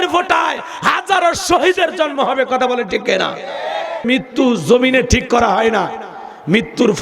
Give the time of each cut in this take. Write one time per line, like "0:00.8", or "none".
0:04.1